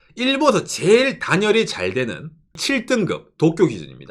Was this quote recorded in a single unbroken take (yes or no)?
no